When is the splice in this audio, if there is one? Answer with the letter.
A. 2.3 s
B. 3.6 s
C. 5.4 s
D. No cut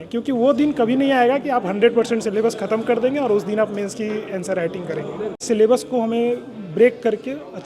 C